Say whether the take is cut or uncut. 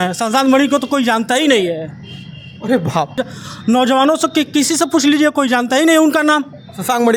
cut